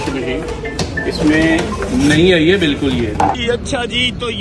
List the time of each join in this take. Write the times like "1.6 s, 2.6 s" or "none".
3.3 s